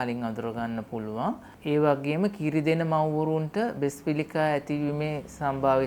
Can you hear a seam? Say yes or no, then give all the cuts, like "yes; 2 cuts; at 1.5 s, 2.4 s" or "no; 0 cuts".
no; 0 cuts